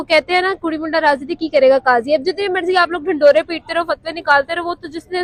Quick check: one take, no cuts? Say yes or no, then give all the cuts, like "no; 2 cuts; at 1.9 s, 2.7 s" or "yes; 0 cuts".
yes; 0 cuts